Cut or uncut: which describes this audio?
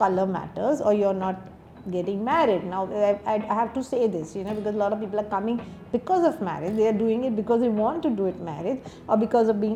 uncut